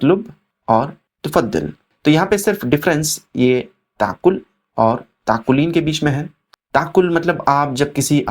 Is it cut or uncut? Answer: cut